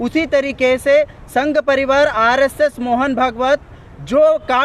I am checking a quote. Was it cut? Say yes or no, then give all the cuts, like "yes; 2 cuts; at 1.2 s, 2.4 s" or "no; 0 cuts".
no; 0 cuts